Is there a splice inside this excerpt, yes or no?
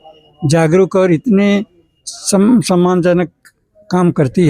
no